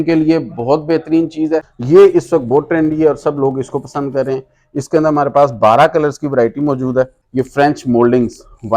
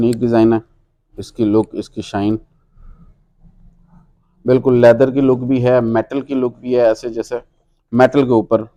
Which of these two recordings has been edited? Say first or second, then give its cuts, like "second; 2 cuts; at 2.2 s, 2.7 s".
first; 2 cuts; at 1.7 s, 7.2 s